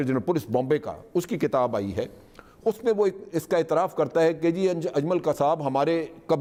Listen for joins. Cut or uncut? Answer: uncut